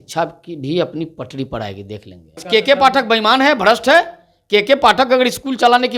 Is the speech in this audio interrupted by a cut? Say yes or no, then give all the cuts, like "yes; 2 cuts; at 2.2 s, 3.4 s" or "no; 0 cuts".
yes; 1 cut; at 2.4 s